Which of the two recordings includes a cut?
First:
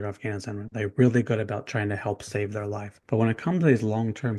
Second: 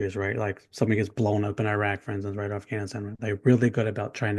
first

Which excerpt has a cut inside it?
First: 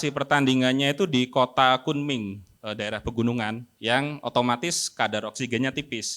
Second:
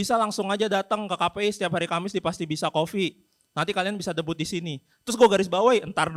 first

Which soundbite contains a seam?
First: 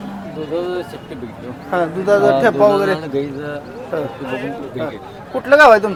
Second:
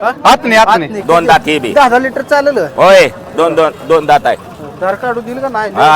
second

